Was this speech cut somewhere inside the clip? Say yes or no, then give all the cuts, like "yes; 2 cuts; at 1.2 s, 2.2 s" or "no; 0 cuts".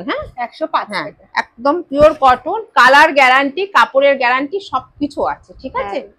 no; 0 cuts